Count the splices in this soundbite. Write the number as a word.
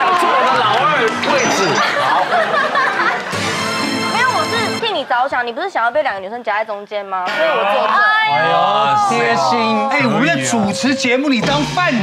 zero